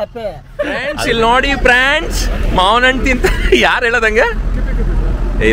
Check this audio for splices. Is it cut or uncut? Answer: cut